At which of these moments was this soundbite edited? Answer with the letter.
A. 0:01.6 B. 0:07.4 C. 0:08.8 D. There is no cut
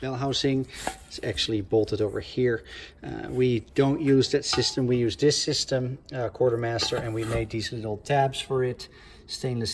D